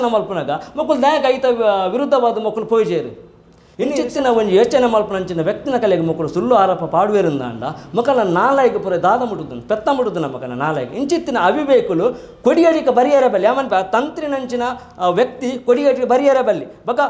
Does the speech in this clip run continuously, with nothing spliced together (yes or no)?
no